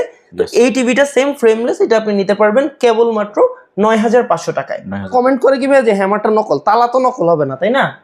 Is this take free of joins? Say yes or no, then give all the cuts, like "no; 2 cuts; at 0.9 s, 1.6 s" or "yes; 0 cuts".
no; 1 cut; at 5.1 s